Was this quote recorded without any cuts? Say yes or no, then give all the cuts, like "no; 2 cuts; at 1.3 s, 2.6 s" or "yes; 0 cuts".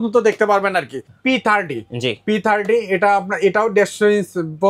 no; 1 cut; at 1.0 s